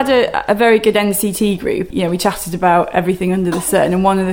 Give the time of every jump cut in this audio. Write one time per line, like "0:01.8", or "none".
0:01.9